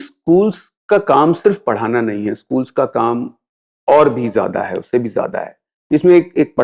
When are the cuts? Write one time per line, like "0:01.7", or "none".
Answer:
none